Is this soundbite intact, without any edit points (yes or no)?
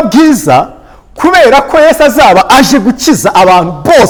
yes